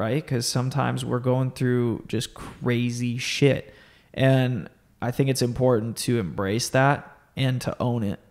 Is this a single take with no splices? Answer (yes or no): yes